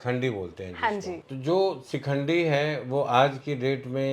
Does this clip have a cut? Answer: yes; 1 cut; at 1.2 s

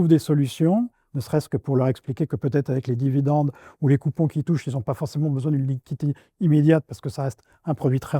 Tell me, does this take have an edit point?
no; 0 cuts

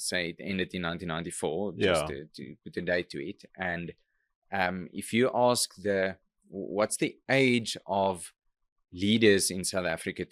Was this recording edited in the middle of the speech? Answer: no; 0 cuts

